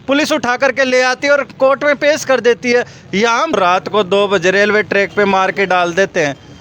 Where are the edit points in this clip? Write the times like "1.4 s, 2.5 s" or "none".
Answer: 3.6 s